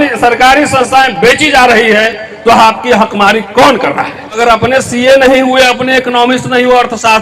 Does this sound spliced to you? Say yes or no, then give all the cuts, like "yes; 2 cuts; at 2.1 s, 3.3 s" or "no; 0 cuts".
yes; 1 cut; at 4.4 s